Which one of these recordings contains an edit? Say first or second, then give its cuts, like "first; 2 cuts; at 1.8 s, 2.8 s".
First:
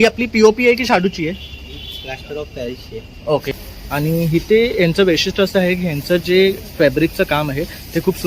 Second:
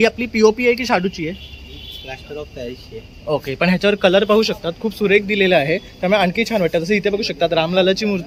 first; 1 cut; at 3.5 s